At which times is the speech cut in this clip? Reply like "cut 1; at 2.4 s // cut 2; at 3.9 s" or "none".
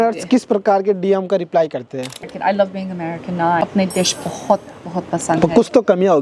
cut 1; at 2.1 s // cut 2; at 3.6 s